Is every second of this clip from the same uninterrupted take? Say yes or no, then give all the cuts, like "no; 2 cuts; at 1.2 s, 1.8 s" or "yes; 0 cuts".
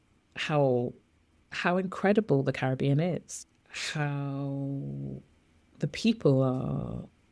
no; 1 cut; at 3.3 s